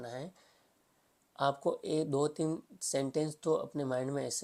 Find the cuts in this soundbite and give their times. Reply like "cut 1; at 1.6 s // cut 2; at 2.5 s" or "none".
none